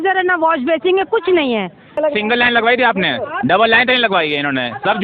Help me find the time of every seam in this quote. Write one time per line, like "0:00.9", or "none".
0:01.9